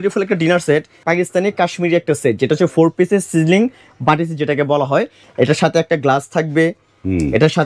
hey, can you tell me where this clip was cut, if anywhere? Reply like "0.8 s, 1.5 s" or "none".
1.0 s, 5.2 s